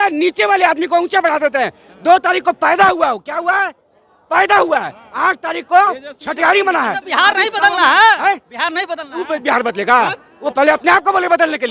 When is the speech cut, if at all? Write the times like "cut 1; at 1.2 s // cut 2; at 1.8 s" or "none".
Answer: none